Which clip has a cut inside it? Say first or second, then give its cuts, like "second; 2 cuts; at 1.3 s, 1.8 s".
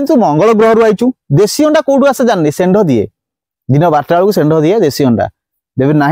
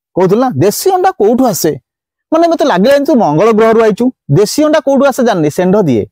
first; 1 cut; at 5.1 s